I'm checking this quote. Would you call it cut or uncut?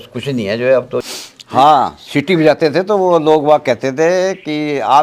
cut